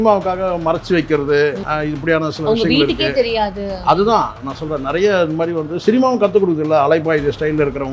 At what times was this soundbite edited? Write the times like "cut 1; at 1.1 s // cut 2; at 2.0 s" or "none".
cut 1; at 1.7 s